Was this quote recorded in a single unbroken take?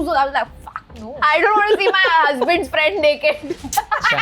no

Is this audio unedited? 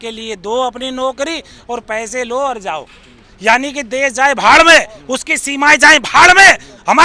yes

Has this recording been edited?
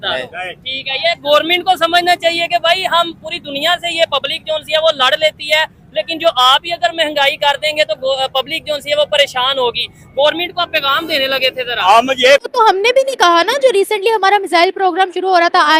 yes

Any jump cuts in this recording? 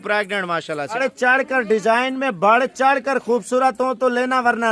yes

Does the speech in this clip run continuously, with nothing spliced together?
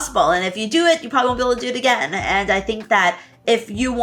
yes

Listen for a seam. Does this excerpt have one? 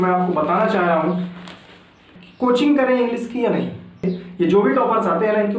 yes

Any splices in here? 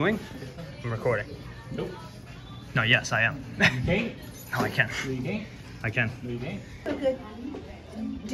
yes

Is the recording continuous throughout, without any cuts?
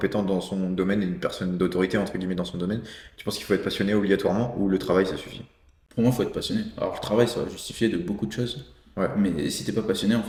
yes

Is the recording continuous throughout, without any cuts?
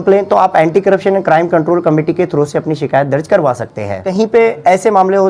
no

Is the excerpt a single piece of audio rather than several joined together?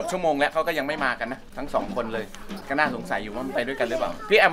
no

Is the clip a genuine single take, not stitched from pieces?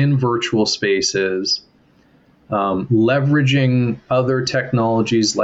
yes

